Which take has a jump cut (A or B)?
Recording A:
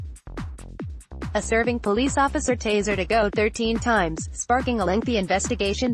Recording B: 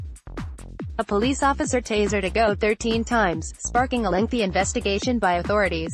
B